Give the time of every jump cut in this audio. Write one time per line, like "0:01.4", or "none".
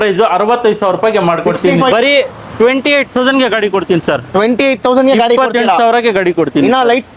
0:01.9